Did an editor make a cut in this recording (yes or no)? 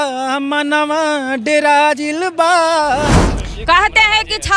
yes